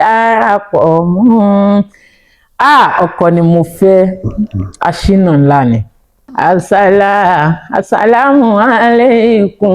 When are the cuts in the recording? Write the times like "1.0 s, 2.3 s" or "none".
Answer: 6.3 s